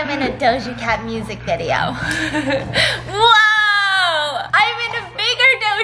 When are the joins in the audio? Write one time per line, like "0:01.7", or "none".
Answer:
none